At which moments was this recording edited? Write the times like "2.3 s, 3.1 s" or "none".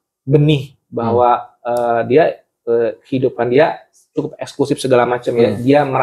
none